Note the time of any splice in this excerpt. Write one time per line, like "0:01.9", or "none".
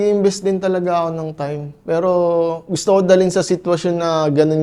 none